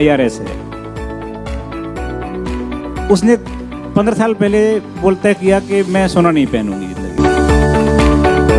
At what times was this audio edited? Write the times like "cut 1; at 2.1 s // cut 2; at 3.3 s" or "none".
cut 1; at 7.2 s